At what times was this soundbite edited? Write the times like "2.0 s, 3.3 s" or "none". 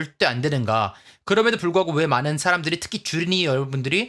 none